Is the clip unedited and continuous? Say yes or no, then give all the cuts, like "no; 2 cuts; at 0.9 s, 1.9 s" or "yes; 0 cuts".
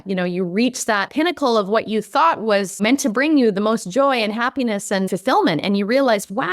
no; 3 cuts; at 1.1 s, 2.8 s, 5.1 s